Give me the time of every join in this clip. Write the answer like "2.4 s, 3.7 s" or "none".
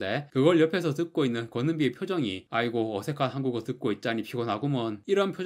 none